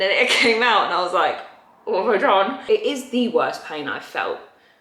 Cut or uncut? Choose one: cut